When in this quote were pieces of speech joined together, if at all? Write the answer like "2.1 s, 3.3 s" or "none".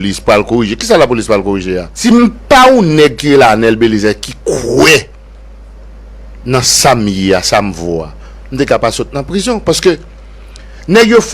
1.9 s